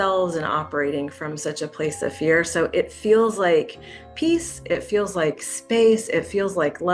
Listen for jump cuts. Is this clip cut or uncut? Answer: uncut